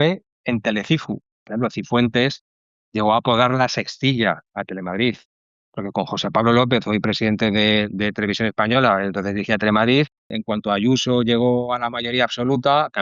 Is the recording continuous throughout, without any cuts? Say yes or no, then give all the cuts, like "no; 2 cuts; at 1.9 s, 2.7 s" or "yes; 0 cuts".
no; 2 cuts; at 1.5 s, 10.3 s